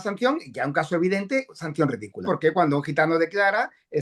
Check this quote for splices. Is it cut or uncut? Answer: cut